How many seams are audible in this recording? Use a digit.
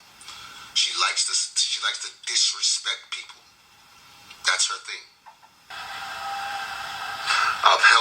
1